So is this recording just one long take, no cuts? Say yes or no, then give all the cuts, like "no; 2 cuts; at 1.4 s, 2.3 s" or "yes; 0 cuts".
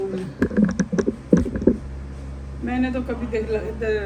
yes; 0 cuts